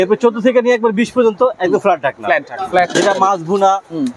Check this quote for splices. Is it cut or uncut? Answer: cut